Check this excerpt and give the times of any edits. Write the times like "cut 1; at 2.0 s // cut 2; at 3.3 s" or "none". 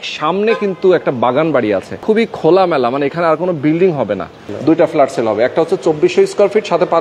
cut 1; at 1.9 s // cut 2; at 4.5 s